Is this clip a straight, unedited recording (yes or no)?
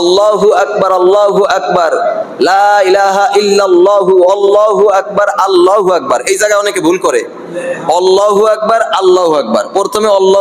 yes